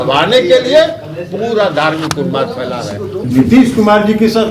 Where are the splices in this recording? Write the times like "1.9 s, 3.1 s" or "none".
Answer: 3.2 s